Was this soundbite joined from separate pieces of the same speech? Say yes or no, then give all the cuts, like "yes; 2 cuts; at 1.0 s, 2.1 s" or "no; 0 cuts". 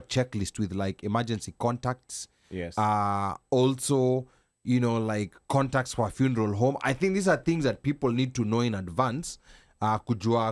no; 0 cuts